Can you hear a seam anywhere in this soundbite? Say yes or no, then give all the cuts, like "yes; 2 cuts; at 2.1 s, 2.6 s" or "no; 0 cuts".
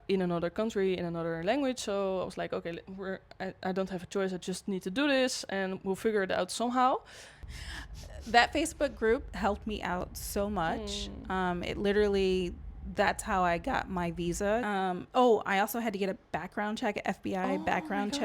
yes; 2 cuts; at 7.4 s, 14.6 s